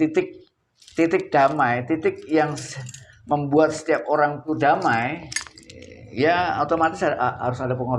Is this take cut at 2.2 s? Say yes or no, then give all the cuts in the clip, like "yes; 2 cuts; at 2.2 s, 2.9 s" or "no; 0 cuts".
no; 1 cut; at 4.5 s